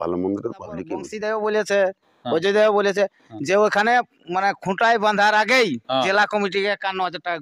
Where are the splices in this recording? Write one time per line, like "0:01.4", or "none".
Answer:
0:01.0